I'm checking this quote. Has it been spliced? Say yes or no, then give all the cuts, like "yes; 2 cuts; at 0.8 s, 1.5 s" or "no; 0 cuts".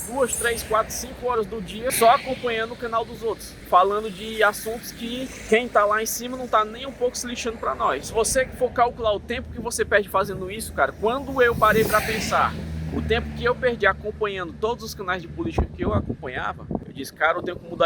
yes; 5 cuts; at 1.9 s, 3.5 s, 5.4 s, 8.1 s, 16.9 s